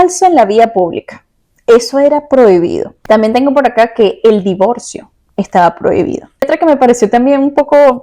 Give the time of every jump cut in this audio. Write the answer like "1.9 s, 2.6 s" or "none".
2.9 s, 6.5 s